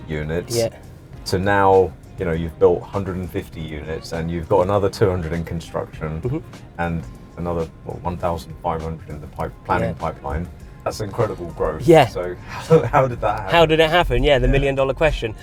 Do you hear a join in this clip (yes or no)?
no